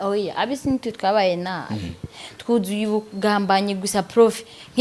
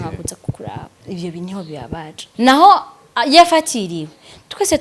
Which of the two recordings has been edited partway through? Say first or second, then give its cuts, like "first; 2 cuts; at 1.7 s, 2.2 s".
second; 2 cuts; at 1.0 s, 2.2 s